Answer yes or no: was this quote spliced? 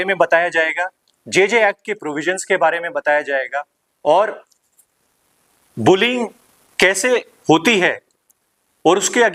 no